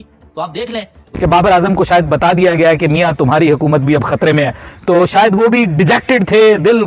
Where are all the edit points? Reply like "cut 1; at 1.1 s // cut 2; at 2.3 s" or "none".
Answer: cut 1; at 1.1 s

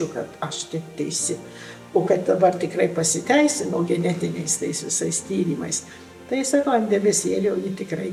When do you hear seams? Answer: none

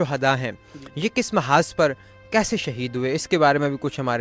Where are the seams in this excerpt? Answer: none

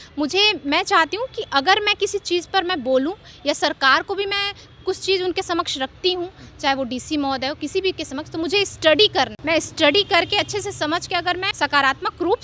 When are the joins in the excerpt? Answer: cut 1; at 9.4 s // cut 2; at 11.5 s

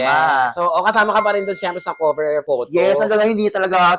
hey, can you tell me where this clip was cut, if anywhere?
none

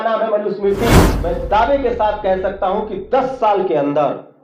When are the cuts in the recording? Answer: cut 1; at 1.2 s

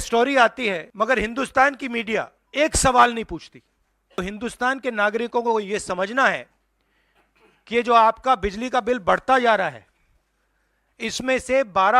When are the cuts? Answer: cut 1; at 0.9 s // cut 2; at 2.4 s // cut 3; at 4.2 s

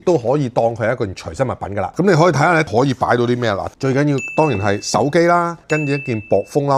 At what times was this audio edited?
none

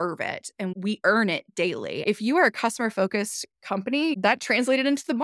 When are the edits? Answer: none

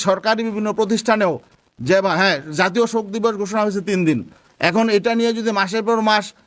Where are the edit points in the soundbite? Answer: none

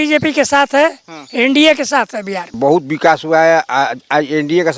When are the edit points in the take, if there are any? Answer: cut 1; at 2.6 s

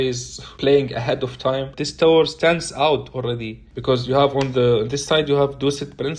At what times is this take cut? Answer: cut 1; at 1.7 s

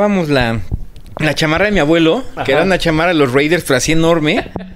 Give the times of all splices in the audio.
none

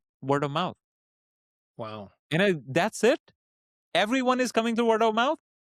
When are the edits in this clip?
none

